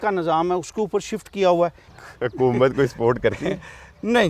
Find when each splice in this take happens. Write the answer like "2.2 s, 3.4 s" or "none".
2.0 s